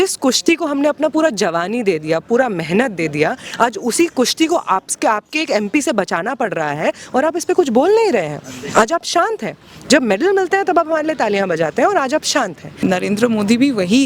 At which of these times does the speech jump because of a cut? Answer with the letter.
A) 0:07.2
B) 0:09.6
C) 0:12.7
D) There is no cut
C